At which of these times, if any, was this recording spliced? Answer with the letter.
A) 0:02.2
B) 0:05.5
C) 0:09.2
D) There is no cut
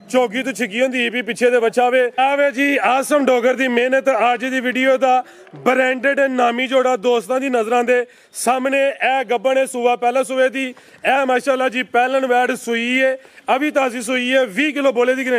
A